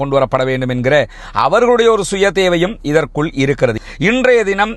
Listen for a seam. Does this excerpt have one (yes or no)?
yes